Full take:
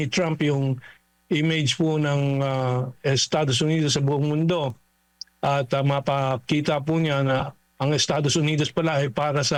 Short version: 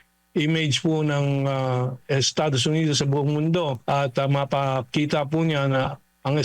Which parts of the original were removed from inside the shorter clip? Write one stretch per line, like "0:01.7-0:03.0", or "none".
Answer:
0:04.7-0:05.3